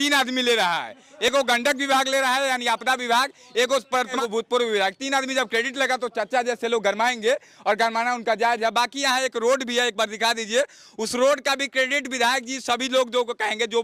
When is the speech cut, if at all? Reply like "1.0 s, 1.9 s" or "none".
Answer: none